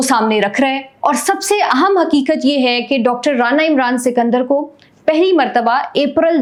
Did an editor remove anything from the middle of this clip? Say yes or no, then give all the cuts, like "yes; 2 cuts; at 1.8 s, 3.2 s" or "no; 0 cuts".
no; 0 cuts